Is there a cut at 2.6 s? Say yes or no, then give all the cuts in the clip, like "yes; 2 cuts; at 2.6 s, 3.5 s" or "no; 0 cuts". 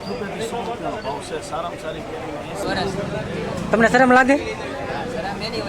yes; 1 cut; at 2.6 s